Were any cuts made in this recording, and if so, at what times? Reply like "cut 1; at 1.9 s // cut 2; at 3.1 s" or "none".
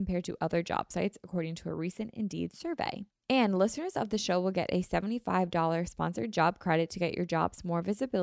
cut 1; at 3.1 s